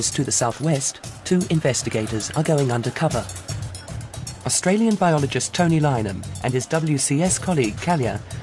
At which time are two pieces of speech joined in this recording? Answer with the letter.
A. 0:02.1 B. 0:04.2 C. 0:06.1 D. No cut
C